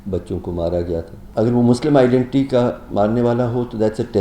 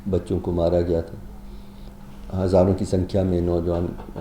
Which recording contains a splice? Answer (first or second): first